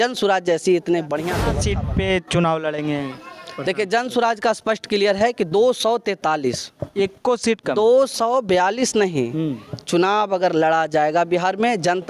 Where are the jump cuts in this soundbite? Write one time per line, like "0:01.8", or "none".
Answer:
0:01.5